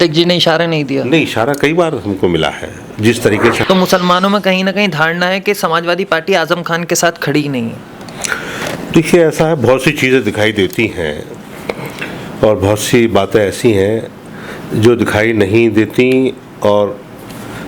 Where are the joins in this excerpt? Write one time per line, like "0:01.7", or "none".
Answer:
0:03.6